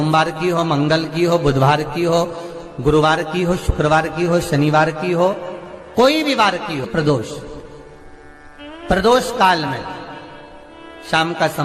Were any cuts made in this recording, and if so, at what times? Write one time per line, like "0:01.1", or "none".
0:06.9